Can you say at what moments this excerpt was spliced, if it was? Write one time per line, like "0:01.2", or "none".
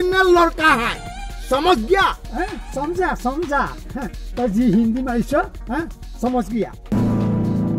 0:02.2
0:06.8